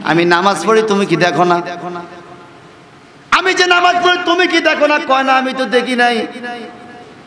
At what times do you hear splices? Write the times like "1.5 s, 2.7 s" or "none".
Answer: none